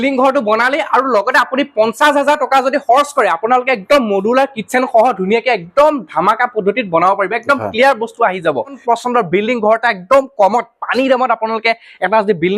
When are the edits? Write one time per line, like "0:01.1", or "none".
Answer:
0:08.8